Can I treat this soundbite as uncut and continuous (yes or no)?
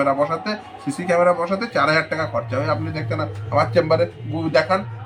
yes